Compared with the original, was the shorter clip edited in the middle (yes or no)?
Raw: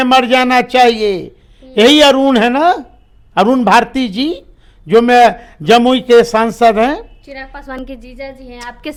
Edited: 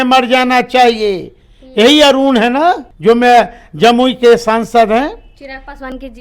yes